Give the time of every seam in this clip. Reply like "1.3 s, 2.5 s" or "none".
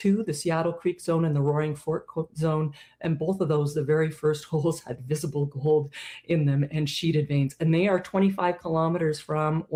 none